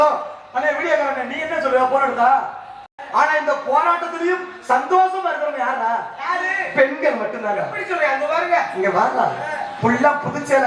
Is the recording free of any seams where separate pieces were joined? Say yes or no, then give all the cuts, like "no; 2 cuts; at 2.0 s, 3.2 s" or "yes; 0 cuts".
no; 1 cut; at 2.9 s